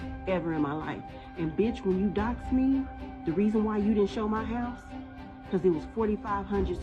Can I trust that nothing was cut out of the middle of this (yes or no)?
yes